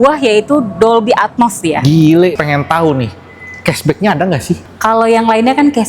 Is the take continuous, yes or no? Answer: no